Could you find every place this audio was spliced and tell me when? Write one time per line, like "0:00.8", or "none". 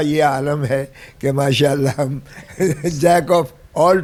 none